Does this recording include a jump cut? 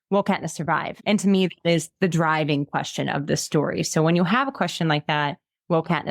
yes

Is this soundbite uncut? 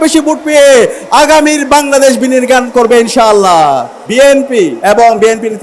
no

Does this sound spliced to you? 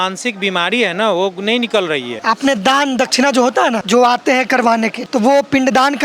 yes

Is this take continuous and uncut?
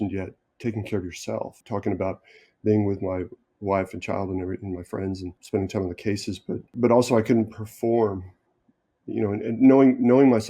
no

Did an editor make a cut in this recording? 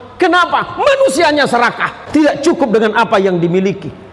yes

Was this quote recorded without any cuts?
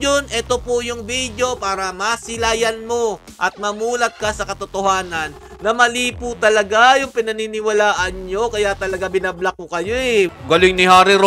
no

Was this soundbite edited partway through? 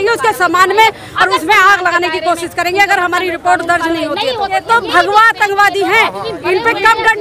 yes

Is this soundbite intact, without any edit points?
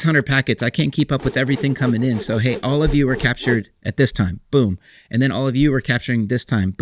yes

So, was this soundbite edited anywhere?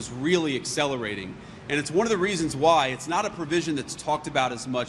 no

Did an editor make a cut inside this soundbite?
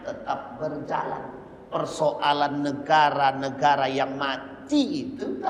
no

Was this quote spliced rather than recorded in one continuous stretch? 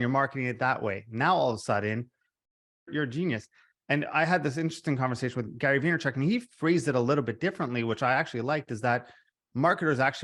yes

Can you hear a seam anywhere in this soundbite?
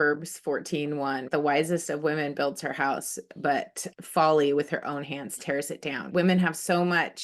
yes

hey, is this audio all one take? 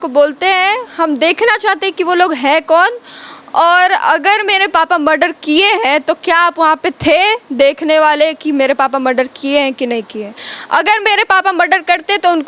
yes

